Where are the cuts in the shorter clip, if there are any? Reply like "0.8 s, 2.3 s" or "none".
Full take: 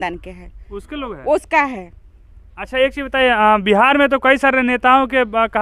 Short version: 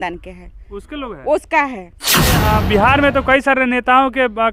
2.4 s